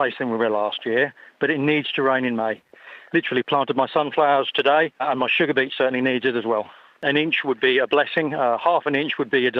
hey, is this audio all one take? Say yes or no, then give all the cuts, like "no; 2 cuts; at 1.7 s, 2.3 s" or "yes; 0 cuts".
no; 4 cuts; at 2.9 s, 5.0 s, 7.0 s, 8.6 s